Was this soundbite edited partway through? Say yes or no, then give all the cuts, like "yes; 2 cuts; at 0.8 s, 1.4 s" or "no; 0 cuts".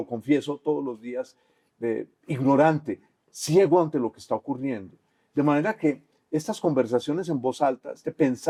no; 0 cuts